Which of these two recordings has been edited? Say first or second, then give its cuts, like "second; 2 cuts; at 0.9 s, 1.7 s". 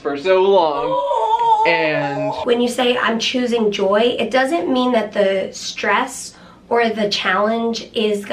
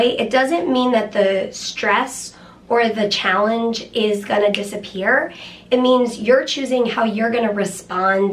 first; 1 cut; at 2.4 s